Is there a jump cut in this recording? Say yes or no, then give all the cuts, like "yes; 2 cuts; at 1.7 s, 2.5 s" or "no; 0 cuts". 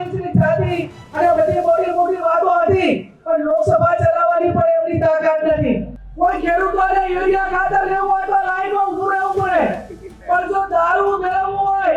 yes; 1 cut; at 5.9 s